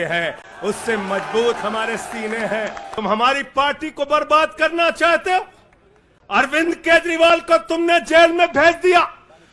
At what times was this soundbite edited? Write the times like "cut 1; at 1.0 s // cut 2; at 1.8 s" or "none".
cut 1; at 2.9 s